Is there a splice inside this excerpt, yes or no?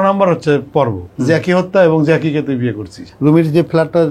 yes